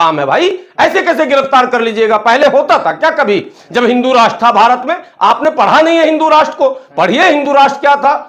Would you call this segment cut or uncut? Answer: uncut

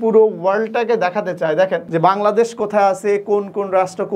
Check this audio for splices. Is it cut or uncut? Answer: cut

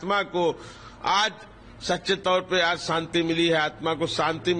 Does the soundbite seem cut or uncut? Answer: uncut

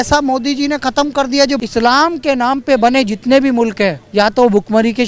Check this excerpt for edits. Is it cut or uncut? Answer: cut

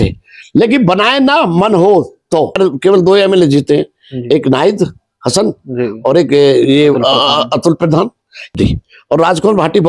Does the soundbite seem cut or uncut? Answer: cut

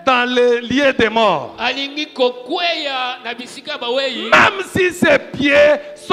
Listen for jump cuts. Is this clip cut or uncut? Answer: uncut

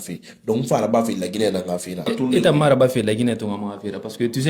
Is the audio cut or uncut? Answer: cut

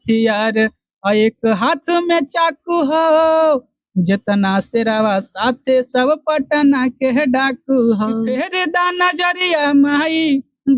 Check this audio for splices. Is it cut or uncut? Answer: cut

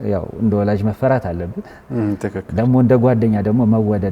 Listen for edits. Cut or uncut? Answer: uncut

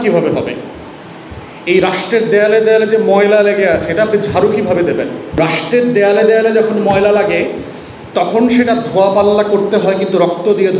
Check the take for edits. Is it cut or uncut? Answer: cut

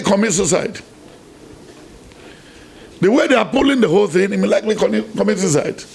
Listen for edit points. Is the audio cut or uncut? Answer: uncut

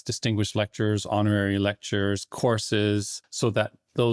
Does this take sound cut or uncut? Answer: cut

